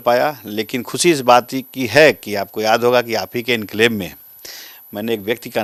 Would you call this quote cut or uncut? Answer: uncut